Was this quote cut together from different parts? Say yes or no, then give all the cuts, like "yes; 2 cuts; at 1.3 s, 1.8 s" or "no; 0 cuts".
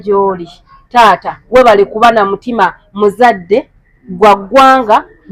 no; 0 cuts